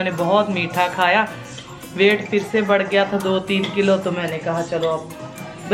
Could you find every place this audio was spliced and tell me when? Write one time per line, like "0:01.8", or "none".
none